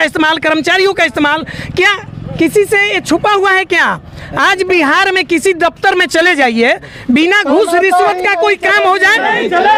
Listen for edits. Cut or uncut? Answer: uncut